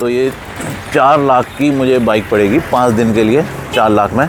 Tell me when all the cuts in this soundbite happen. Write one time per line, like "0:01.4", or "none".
none